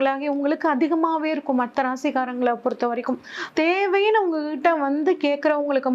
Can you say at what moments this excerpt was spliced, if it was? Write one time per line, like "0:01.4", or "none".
0:03.4